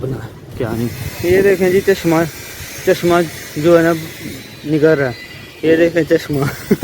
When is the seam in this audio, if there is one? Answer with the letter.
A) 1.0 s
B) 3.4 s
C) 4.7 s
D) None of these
A